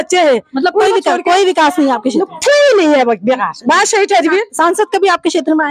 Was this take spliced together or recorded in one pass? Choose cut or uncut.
uncut